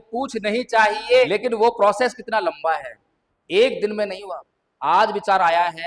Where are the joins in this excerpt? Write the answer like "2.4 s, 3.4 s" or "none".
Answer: 1.3 s